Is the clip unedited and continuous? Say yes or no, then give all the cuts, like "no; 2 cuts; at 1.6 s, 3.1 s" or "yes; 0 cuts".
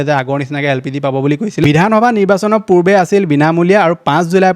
no; 1 cut; at 1.6 s